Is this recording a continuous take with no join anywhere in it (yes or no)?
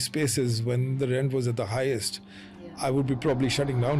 yes